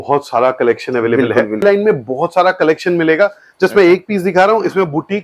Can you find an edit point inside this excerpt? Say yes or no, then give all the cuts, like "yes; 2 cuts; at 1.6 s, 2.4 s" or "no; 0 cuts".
yes; 1 cut; at 1.6 s